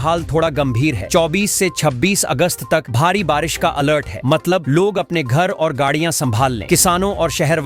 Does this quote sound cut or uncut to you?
uncut